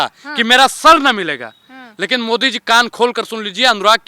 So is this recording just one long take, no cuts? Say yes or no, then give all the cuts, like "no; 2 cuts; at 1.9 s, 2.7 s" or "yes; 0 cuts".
yes; 0 cuts